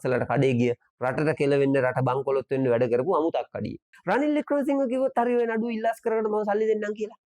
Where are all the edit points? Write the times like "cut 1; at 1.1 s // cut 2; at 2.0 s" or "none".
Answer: cut 1; at 3.9 s